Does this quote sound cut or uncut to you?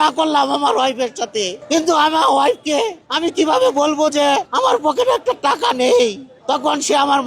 cut